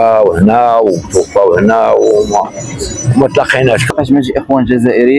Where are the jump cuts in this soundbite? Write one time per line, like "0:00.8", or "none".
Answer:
0:03.8